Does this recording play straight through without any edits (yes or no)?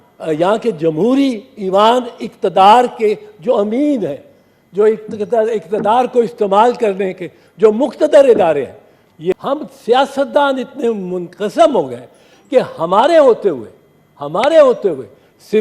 no